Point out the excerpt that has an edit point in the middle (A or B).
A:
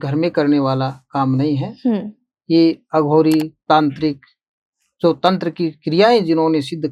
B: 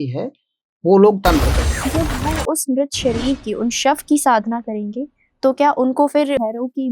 B